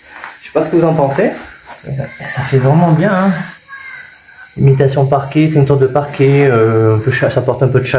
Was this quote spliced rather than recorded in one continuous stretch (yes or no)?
no